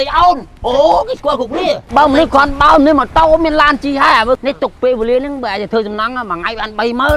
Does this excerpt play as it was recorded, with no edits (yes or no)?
no